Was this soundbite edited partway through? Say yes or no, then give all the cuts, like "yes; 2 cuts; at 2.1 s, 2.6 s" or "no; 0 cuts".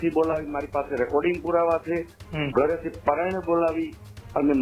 no; 0 cuts